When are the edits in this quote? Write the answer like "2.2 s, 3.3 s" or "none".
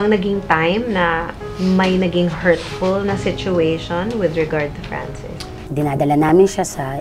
1.4 s